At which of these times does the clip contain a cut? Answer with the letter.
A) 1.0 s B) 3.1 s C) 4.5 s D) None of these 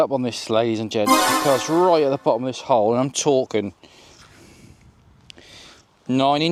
D